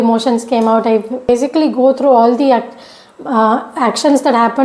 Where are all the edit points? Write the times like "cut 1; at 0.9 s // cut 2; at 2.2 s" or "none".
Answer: cut 1; at 1.3 s